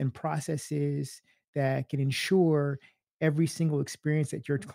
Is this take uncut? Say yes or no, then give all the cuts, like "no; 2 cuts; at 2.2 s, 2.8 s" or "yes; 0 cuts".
yes; 0 cuts